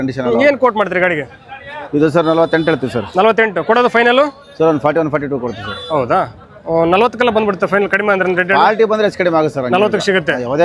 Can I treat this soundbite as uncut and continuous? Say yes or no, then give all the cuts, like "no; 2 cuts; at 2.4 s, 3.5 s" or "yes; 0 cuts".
yes; 0 cuts